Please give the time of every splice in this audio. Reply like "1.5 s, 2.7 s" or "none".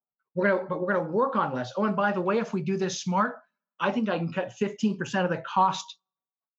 none